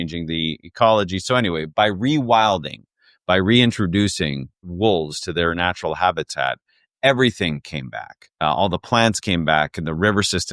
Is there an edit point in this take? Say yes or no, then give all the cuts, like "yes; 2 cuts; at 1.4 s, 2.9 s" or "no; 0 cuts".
yes; 1 cut; at 4.5 s